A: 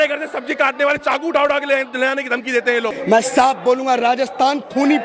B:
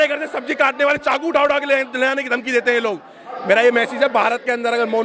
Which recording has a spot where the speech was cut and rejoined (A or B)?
A